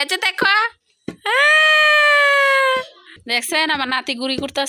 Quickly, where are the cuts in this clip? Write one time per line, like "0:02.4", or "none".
0:03.2